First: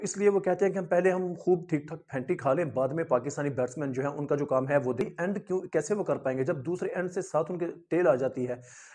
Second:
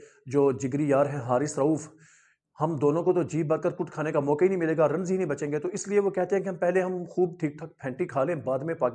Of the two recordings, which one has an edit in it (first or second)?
first